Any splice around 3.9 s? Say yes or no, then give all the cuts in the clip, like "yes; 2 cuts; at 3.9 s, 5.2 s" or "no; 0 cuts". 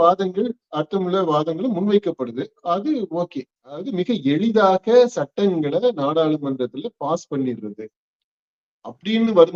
yes; 1 cut; at 3.9 s